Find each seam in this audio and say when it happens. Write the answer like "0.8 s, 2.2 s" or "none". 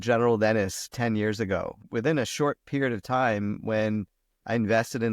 0.9 s, 1.8 s